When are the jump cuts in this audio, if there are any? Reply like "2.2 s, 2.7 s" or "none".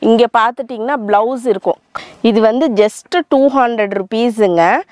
1.8 s